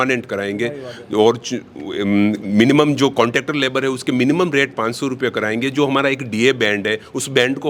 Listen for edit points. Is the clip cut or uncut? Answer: uncut